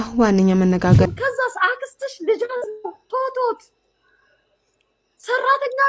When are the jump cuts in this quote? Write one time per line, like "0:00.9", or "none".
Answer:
0:01.1